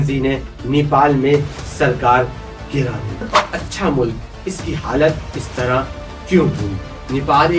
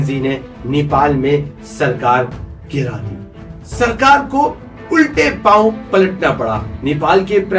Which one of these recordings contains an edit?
first; 1 cut; at 3.3 s

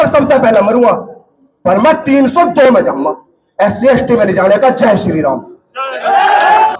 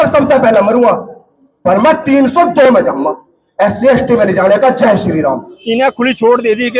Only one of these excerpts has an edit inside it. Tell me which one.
second; 1 cut; at 5.5 s

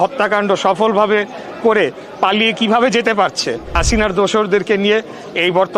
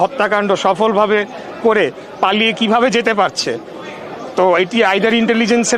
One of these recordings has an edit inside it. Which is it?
first; 1 cut; at 3.8 s

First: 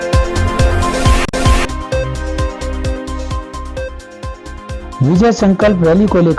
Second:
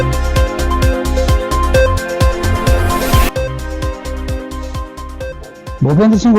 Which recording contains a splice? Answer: first; 1 cut; at 1.2 s

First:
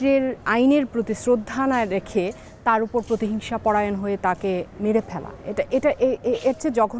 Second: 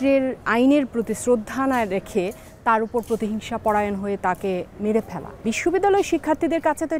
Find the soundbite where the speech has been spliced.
second; 1 cut; at 5.4 s

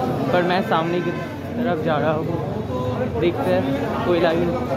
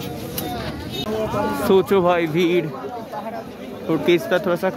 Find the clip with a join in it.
second; 1 cut; at 1.0 s

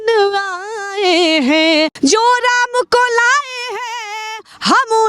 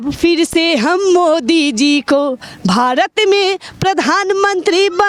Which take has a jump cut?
first; 1 cut; at 1.9 s

